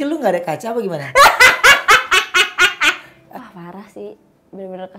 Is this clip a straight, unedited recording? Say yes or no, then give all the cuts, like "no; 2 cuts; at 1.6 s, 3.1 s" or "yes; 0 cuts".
no; 1 cut; at 3.1 s